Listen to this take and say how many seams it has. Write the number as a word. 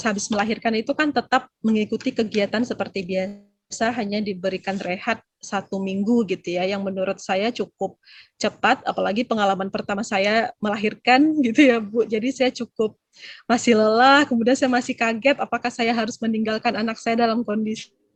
zero